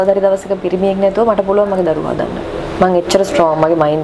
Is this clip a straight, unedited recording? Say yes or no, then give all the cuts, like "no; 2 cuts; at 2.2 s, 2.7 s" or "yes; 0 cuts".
yes; 0 cuts